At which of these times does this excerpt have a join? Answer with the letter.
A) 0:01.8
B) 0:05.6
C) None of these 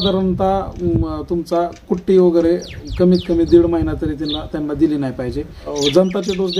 B